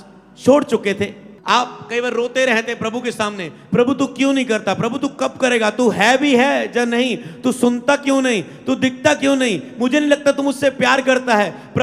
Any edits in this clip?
yes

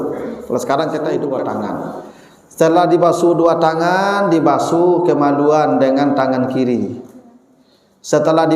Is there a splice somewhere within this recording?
yes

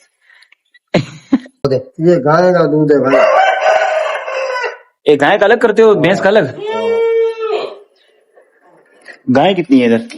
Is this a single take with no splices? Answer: no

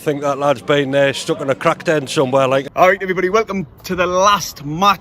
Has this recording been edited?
yes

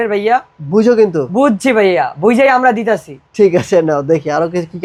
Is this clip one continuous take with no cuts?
yes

